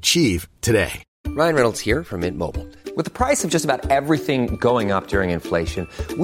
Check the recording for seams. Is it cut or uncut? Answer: cut